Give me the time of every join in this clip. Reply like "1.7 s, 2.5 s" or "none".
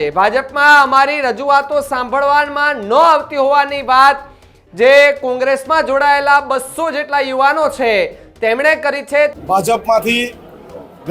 9.3 s

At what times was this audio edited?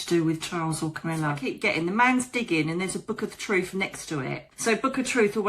1.4 s, 4.5 s

